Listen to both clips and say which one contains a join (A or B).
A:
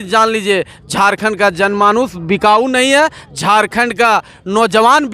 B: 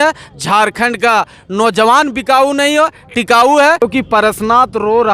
B